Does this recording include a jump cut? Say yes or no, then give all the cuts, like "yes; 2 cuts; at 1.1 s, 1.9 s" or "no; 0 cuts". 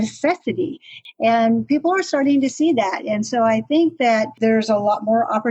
yes; 2 cuts; at 0.9 s, 4.4 s